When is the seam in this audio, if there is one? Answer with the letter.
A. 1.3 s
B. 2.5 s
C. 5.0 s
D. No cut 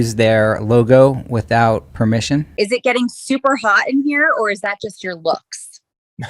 B